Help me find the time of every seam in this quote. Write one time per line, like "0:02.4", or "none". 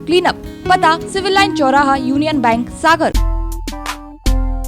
0:03.1